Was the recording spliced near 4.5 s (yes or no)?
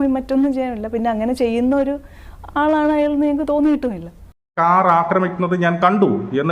yes